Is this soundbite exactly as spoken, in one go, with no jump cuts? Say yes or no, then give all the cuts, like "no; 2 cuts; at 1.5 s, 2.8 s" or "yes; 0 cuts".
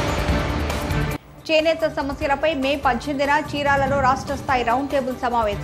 no; 1 cut; at 1.0 s